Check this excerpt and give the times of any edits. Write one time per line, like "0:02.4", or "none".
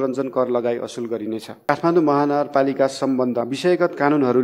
0:01.5
0:03.5